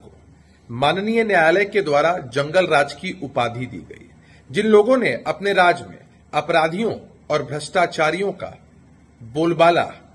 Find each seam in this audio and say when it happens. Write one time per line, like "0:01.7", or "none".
none